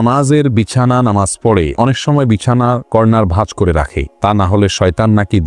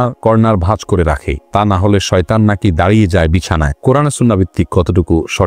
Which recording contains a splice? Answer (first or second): second